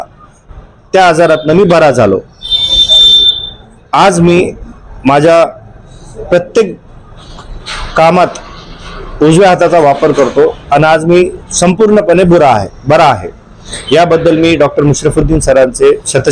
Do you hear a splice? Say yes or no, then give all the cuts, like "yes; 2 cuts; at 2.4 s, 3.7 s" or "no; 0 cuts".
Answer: no; 0 cuts